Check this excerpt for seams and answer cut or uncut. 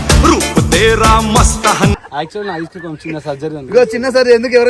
cut